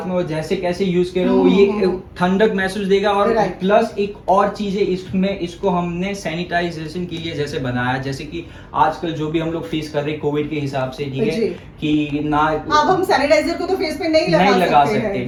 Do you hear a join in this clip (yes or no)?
no